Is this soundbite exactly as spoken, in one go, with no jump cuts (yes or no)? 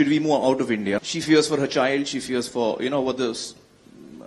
yes